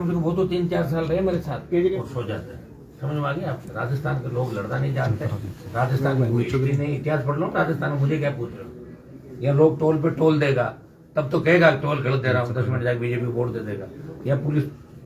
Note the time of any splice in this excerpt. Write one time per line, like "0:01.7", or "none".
0:02.0